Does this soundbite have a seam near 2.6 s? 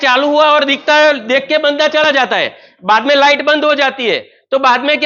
no; 0 cuts

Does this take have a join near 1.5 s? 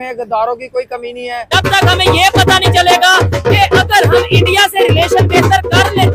yes; 1 cut; at 1.5 s

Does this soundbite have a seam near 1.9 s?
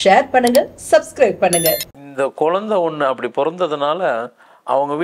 yes; 1 cut; at 1.9 s

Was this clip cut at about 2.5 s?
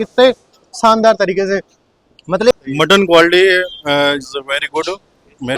yes; 1 cut; at 2.5 s

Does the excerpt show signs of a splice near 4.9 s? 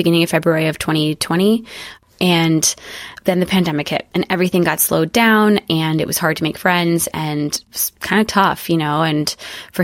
no; 2 cuts; at 2.0 s, 7.6 s

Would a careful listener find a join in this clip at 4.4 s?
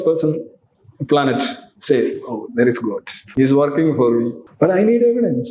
yes; 2 cuts; at 3.2 s, 4.4 s

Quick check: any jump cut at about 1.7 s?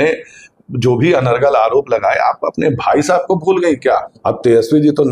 no; 1 cut; at 4.1 s

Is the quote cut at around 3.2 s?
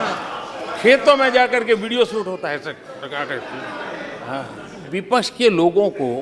no; 1 cut; at 4.9 s

